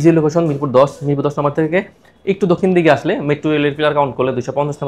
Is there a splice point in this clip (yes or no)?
no